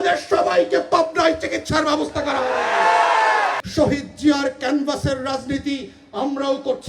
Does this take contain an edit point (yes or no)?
yes